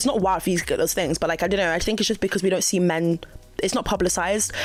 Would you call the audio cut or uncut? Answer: uncut